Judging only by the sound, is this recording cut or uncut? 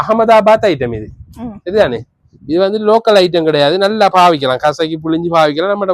uncut